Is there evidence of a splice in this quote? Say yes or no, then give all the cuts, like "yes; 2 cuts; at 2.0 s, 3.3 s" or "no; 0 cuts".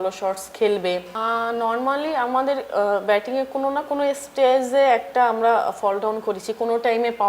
yes; 1 cut; at 1.1 s